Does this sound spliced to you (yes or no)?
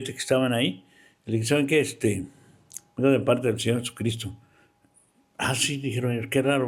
no